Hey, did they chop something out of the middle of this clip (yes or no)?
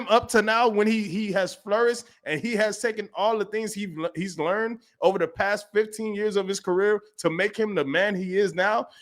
no